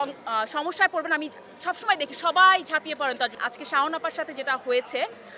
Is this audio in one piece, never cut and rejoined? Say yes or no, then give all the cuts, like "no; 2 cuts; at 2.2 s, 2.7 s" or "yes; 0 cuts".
no; 1 cut; at 3.3 s